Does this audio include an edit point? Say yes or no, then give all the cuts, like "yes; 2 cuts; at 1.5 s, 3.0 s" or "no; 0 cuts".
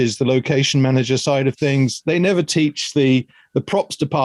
no; 0 cuts